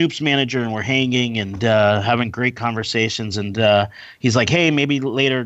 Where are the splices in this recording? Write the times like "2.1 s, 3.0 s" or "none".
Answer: none